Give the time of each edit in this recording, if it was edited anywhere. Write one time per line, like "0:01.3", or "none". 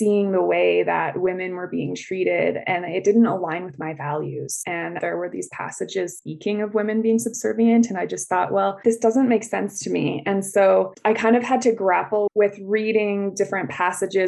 0:05.0